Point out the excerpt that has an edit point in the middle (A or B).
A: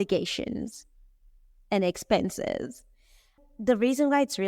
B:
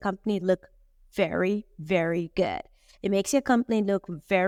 A